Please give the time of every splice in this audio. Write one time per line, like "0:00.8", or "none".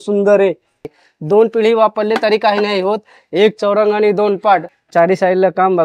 0:00.8
0:04.8